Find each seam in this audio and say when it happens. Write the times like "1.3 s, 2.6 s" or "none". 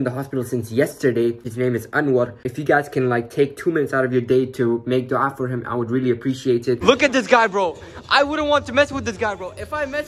1.5 s, 2.5 s, 6.8 s